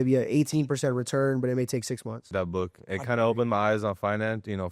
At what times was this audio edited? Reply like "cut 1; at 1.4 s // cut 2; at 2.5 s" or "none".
cut 1; at 2.3 s